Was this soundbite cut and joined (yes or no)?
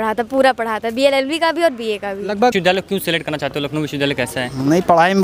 yes